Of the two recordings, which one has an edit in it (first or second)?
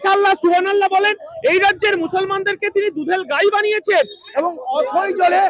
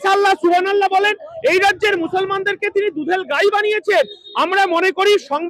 first